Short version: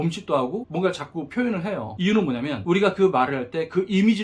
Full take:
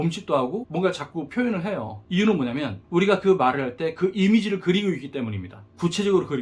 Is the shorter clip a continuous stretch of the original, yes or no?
no